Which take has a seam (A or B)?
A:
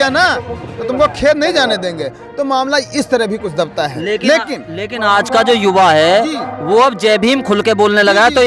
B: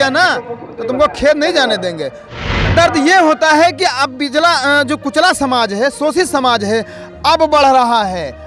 B